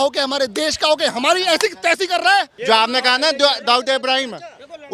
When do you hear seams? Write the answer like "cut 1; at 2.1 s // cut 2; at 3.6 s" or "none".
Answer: cut 1; at 2.5 s

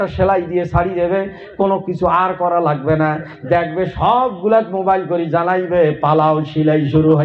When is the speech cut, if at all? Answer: none

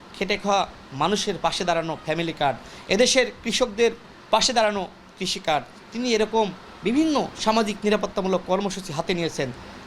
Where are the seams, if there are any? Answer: none

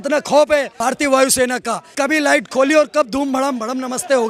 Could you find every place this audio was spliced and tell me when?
cut 1; at 1.0 s // cut 2; at 1.8 s

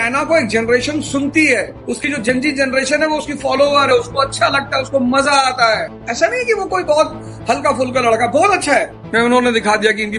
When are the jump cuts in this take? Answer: cut 1; at 6.0 s // cut 2; at 9.0 s

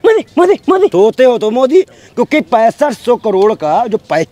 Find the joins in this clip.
cut 1; at 0.9 s

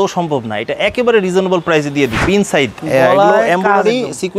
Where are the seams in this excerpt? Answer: cut 1; at 2.2 s

